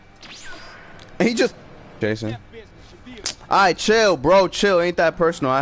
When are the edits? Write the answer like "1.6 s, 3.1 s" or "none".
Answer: 2.0 s